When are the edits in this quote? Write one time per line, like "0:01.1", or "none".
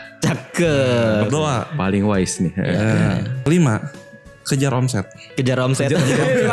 0:05.2

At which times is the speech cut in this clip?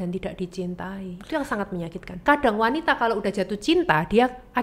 0:02.2

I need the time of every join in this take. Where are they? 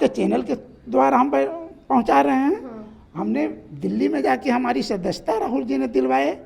none

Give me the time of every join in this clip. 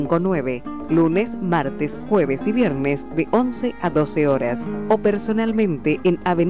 none

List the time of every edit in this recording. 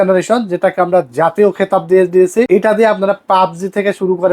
0:02.5

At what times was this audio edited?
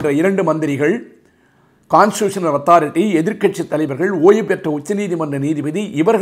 none

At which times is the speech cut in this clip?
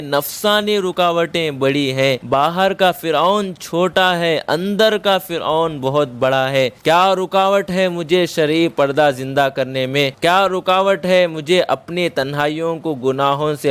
0:02.2
0:06.8
0:10.1

